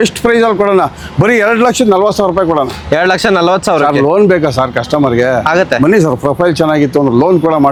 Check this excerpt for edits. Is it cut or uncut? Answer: uncut